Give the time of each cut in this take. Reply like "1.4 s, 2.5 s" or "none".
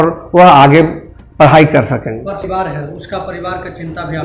2.4 s